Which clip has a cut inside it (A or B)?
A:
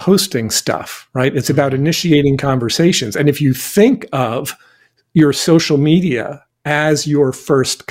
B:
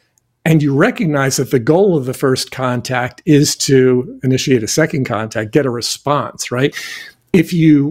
B